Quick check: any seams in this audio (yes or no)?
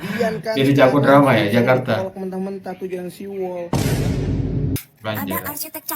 yes